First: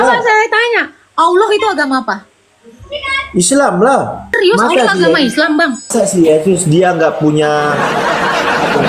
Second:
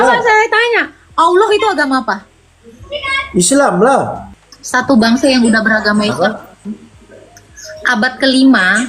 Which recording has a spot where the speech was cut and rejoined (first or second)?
second